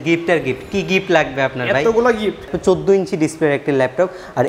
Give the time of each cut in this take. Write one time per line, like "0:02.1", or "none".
0:02.5